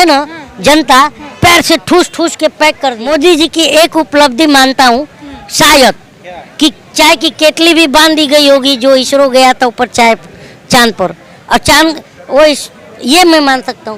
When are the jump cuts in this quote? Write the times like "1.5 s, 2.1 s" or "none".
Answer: 3.0 s